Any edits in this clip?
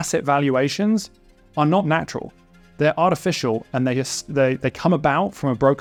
no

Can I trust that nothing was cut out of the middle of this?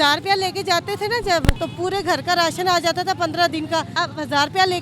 no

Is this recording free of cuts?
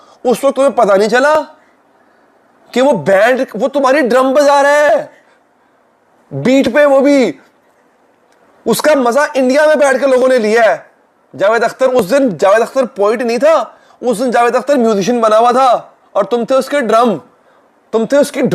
yes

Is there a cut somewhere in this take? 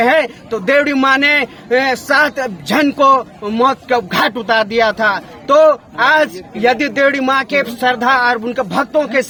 no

